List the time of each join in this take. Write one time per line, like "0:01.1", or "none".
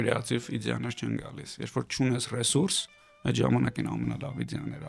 none